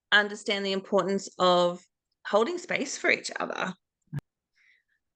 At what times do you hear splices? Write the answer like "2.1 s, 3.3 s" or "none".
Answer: 4.2 s